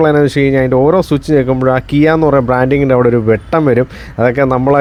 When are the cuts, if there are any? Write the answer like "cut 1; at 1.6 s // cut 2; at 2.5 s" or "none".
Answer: none